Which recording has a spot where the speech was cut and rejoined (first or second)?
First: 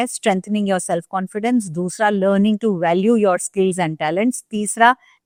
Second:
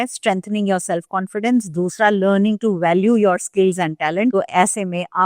second